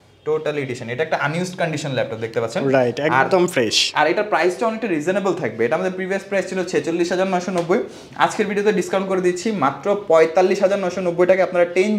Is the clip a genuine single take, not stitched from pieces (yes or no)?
yes